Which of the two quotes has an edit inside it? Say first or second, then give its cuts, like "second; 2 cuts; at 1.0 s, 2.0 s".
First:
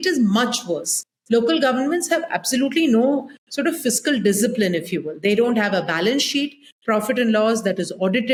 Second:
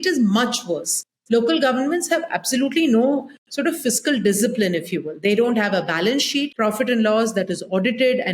second; 1 cut; at 6.5 s